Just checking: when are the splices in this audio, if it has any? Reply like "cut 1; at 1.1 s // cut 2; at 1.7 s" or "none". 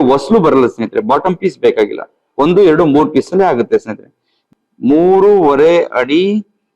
cut 1; at 4.4 s